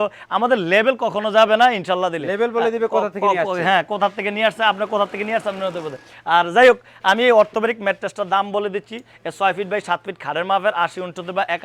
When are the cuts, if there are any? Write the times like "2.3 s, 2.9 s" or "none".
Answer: none